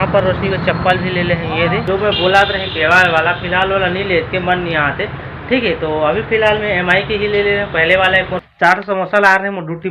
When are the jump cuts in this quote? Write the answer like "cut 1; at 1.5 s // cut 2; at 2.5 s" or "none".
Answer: cut 1; at 1.8 s // cut 2; at 8.7 s